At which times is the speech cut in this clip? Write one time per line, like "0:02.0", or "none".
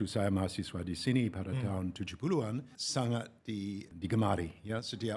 0:02.6
0:03.9